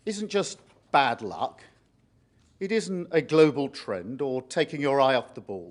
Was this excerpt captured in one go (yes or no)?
yes